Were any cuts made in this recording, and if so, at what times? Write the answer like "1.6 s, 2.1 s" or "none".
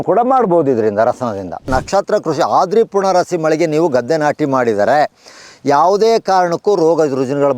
1.7 s